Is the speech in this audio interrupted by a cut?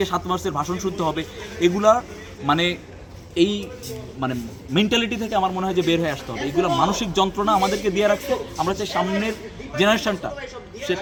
no; 0 cuts

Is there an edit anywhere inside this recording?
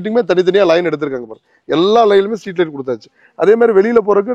no; 0 cuts

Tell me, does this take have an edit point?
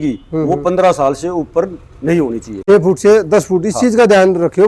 yes; 1 cut; at 2.5 s

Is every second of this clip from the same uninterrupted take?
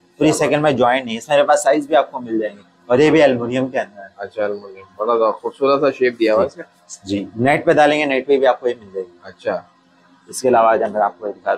yes; 0 cuts

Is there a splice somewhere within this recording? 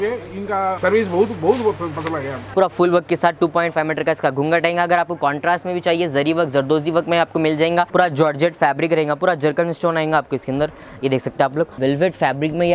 yes; 4 cuts; at 0.8 s, 2.4 s, 7.9 s, 11.7 s

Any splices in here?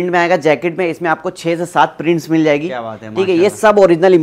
no; 0 cuts

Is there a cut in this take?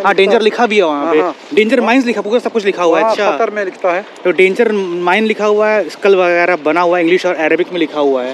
no; 0 cuts

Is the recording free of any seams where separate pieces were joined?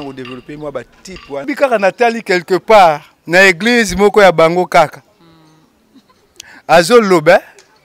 no; 1 cut; at 1.4 s

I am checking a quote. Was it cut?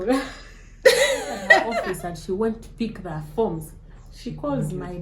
yes; 1 cut; at 1.7 s

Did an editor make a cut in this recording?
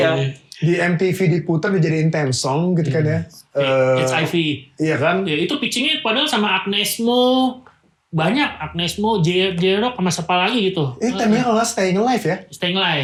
no; 0 cuts

